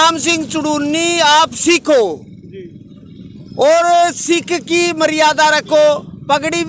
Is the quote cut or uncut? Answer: uncut